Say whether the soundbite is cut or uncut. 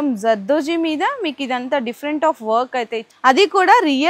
cut